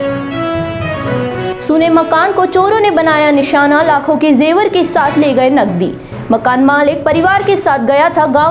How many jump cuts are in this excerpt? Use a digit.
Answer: 1